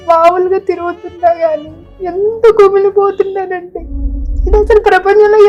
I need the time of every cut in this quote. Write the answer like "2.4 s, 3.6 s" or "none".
none